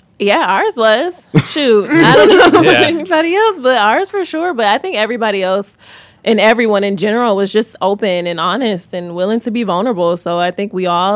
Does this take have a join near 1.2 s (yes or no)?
no